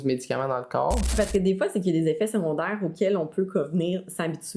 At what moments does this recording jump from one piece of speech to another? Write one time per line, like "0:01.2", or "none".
0:01.1